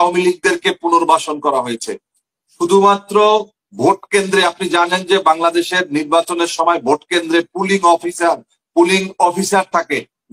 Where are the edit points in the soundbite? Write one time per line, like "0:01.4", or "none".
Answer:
none

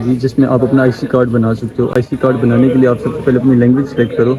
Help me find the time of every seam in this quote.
none

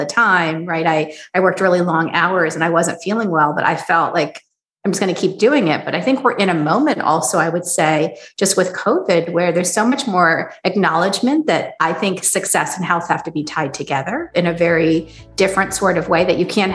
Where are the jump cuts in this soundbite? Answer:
none

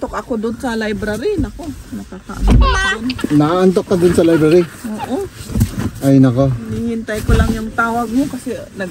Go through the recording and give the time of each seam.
none

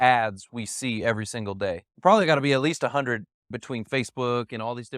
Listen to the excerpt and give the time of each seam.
0:01.9
0:03.5

